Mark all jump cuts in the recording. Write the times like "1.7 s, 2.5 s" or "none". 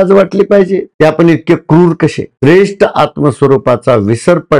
2.3 s